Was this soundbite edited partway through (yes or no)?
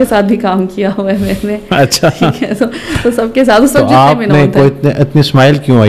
no